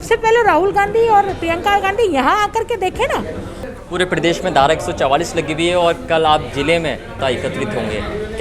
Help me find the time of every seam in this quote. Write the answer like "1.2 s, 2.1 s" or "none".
3.7 s, 7.1 s

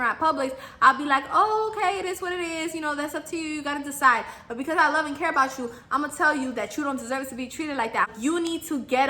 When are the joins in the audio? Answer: 8.1 s

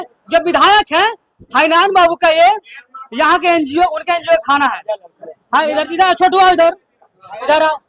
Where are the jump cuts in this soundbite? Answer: none

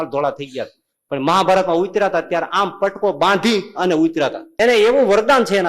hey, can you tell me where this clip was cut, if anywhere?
4.4 s

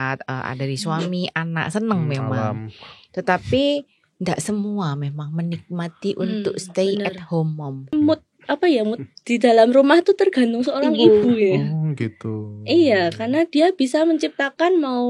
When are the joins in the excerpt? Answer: 7.9 s

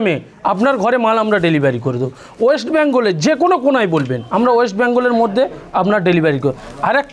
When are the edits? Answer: 4.2 s

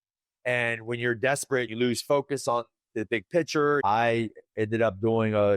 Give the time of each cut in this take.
1.7 s, 3.8 s

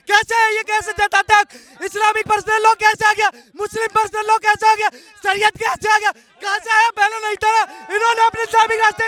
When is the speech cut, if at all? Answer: none

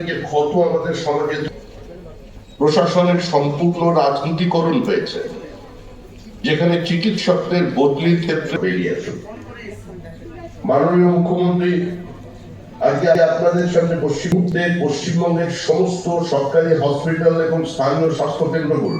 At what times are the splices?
13.1 s

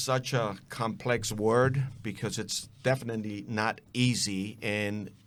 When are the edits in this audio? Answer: none

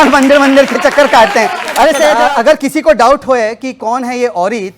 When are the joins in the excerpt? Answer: 2.2 s

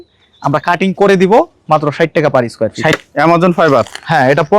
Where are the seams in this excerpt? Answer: 3.0 s

